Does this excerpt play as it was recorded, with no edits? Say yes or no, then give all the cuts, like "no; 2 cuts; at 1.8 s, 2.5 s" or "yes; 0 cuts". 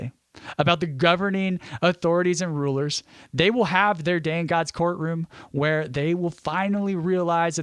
yes; 0 cuts